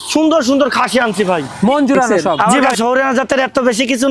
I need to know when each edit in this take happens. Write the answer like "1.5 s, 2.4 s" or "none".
2.6 s